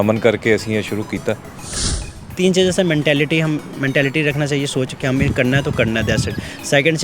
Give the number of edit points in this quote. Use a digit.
1